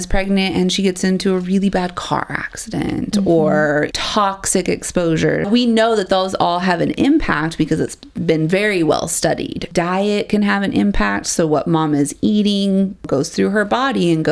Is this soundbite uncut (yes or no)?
no